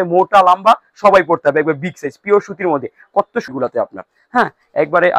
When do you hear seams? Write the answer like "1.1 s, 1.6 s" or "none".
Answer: 3.5 s